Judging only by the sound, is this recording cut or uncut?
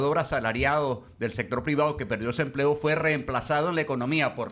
uncut